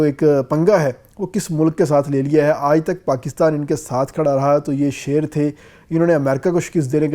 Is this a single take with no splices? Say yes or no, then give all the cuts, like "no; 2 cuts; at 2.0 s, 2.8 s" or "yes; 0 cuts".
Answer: yes; 0 cuts